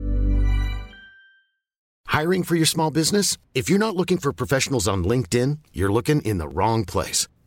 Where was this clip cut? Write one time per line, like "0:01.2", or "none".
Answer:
0:01.9